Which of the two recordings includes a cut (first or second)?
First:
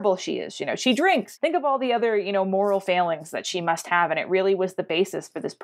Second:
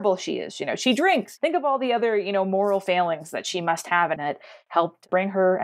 second